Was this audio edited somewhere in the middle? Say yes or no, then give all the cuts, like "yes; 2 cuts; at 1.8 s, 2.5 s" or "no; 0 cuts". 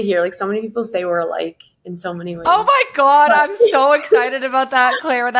no; 0 cuts